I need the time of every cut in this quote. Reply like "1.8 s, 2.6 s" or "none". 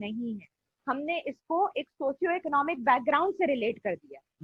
none